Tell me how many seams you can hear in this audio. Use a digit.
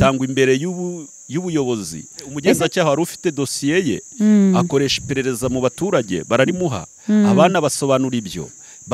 1